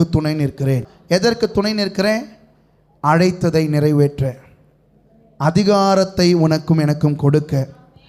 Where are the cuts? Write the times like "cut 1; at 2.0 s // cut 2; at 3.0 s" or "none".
cut 1; at 0.9 s

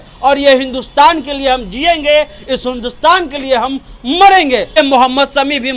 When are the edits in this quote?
cut 1; at 4.8 s

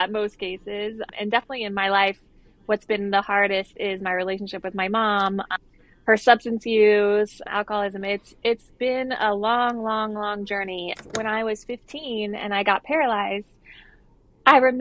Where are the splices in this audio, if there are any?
cut 1; at 11.0 s

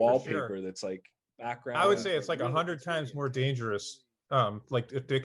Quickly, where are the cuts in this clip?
cut 1; at 1.6 s

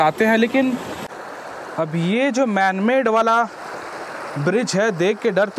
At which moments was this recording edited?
cut 1; at 1.1 s

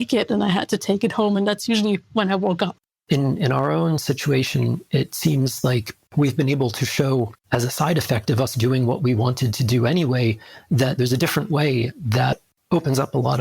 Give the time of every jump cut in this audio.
cut 1; at 2.8 s

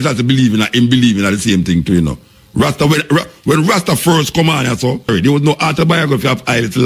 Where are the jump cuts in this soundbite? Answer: cut 1; at 5.1 s

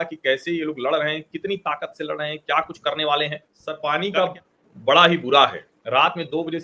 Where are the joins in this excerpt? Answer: cut 1; at 3.7 s

